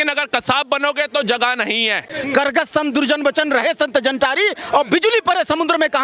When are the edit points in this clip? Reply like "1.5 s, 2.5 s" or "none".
2.1 s